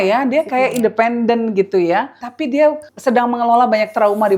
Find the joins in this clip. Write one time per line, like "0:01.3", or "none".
0:02.2
0:02.9